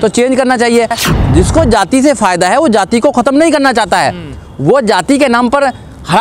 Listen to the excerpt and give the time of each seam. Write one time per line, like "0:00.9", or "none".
0:01.0

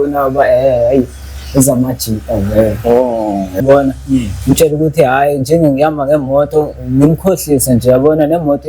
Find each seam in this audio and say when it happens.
0:03.6

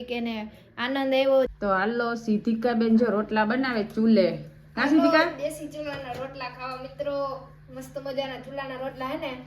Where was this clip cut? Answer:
0:01.5

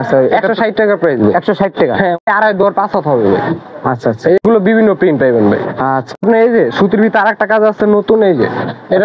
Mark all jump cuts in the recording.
0:02.2
0:06.2

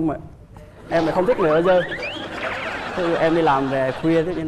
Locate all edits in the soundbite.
none

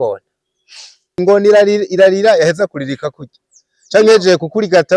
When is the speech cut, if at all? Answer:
0:01.1

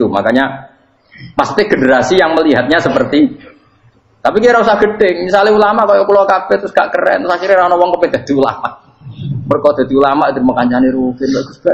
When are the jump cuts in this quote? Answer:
none

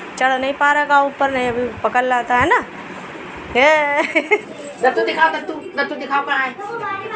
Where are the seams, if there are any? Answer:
0:04.4

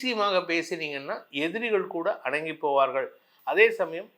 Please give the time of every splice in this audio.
none

